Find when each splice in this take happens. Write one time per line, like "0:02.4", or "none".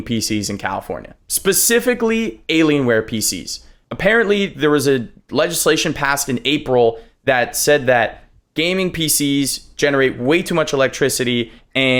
none